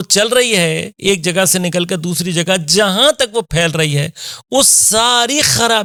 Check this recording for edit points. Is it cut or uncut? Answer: uncut